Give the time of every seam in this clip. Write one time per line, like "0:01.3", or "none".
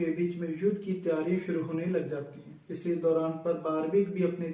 none

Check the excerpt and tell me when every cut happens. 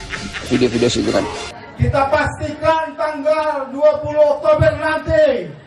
0:01.4

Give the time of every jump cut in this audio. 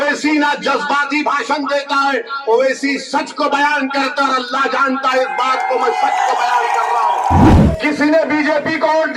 0:07.5

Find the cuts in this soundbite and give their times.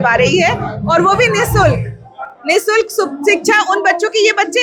none

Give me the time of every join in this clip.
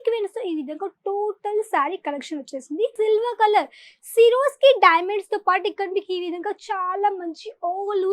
0:02.9

